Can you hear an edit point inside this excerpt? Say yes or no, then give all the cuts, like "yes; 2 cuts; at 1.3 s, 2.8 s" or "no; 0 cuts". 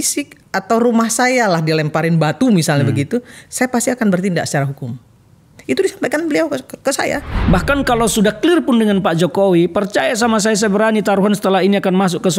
yes; 1 cut; at 7.3 s